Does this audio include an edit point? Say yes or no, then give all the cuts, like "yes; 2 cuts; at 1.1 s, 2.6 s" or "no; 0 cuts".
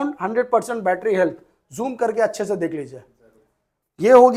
no; 0 cuts